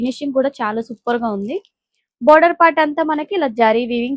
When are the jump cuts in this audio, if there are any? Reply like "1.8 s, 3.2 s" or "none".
none